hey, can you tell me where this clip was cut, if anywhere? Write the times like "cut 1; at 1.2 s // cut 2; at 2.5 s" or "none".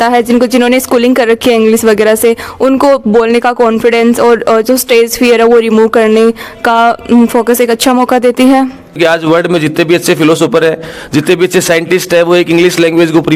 cut 1; at 9.0 s